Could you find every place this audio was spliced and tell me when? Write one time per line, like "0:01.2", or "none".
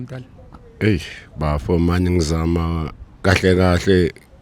none